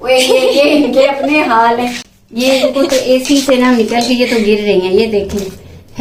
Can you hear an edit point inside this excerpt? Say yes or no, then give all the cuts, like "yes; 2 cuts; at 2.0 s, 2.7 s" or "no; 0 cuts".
no; 0 cuts